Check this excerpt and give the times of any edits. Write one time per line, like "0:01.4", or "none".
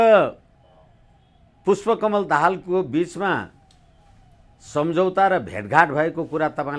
none